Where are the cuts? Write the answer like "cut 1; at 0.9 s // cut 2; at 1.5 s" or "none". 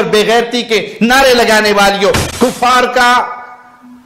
cut 1; at 2.2 s

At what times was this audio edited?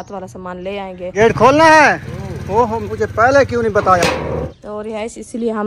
cut 1; at 1.1 s // cut 2; at 4.6 s

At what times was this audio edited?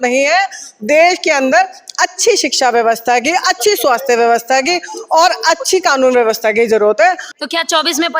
cut 1; at 7.3 s

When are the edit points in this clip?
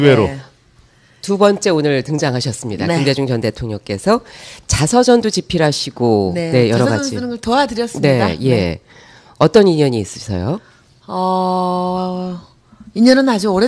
cut 1; at 2.6 s

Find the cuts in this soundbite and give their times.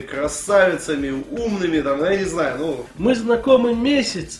cut 1; at 2.9 s

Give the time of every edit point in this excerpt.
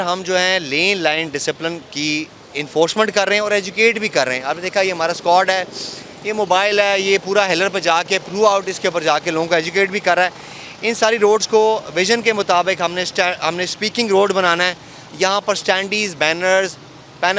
none

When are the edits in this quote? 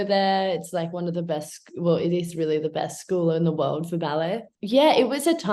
cut 1; at 4.5 s

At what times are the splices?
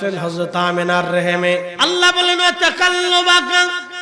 cut 1; at 1.7 s

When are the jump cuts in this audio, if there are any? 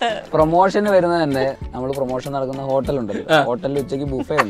cut 1; at 1.5 s

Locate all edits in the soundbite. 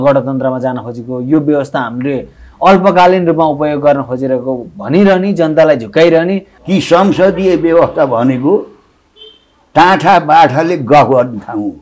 cut 1; at 6.5 s

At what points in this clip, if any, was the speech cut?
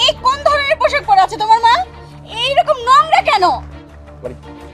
none

